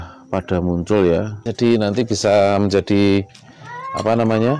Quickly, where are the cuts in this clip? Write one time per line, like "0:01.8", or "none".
0:01.4